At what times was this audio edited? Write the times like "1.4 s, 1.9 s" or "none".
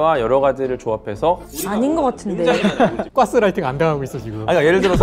1.5 s, 3.0 s